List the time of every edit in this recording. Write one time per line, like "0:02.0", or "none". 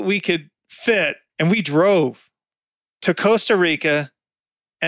0:01.2